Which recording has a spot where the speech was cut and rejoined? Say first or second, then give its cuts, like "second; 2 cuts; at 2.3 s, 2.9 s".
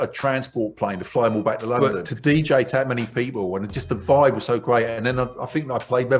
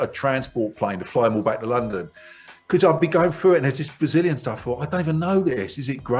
first; 1 cut; at 1.8 s